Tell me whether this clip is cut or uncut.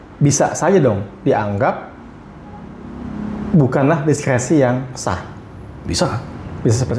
uncut